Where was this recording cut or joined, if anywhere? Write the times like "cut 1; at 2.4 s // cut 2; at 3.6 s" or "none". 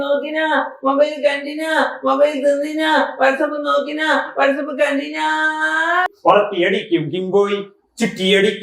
cut 1; at 6.1 s